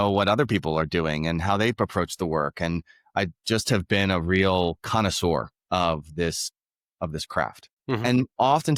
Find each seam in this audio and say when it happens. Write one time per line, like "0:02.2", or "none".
none